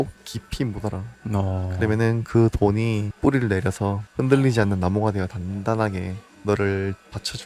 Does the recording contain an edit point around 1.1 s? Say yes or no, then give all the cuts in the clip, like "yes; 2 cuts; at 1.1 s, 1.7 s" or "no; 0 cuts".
no; 0 cuts